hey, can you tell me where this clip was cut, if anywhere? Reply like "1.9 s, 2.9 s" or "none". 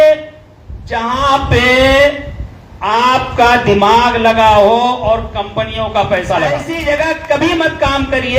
6.7 s